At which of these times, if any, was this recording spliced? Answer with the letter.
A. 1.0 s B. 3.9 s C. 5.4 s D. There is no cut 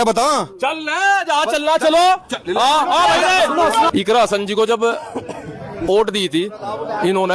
B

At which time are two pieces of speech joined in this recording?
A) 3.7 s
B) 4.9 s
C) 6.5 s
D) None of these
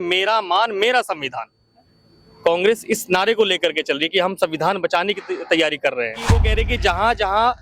C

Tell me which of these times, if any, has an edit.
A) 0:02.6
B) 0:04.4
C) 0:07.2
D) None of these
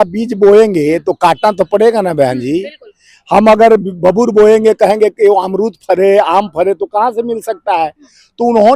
D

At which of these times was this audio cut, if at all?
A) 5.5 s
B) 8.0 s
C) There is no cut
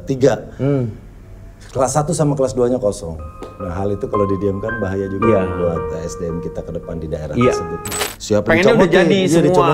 B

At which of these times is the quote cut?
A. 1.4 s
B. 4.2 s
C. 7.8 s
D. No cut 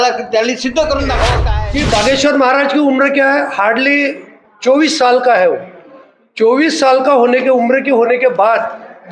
A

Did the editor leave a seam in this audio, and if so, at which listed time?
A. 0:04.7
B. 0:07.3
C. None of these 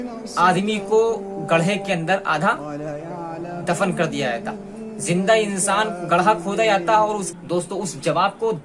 B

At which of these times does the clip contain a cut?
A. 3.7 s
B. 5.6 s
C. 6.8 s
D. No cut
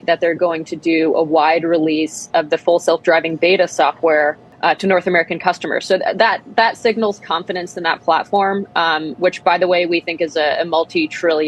D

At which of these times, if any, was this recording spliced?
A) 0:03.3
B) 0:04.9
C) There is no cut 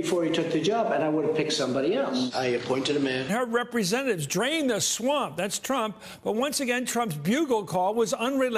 C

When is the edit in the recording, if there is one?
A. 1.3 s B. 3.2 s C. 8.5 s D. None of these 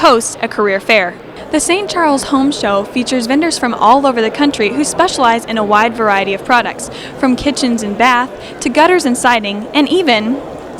A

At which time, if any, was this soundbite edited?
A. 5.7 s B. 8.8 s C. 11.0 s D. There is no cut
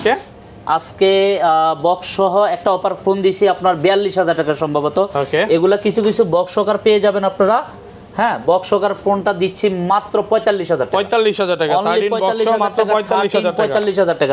D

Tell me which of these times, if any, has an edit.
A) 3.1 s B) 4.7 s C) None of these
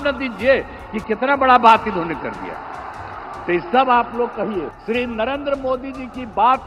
B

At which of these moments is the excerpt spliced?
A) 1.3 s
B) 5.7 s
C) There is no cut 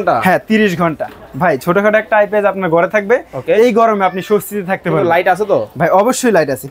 A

